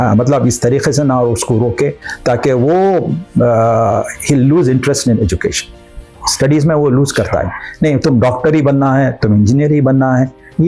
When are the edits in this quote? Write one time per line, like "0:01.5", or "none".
none